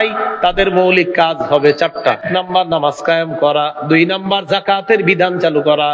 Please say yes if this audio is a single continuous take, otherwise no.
no